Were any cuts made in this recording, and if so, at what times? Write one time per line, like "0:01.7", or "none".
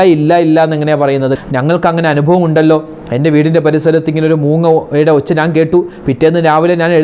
0:01.4